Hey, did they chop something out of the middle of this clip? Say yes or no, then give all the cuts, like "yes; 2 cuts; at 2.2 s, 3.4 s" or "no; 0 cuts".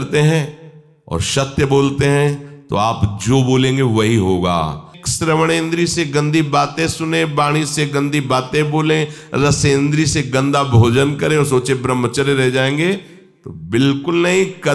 yes; 1 cut; at 5.0 s